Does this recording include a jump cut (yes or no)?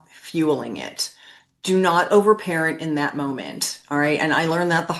no